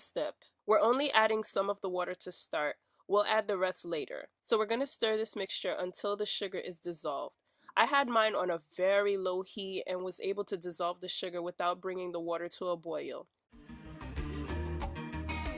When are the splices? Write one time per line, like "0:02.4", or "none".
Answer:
0:13.8